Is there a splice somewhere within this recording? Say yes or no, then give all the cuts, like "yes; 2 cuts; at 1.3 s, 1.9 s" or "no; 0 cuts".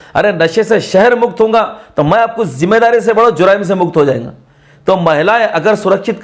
no; 0 cuts